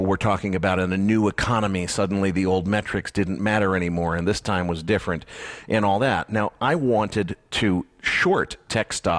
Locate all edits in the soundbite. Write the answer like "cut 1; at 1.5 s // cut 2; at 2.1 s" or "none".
cut 1; at 2.8 s